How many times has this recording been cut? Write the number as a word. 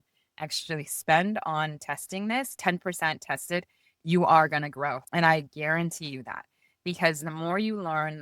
two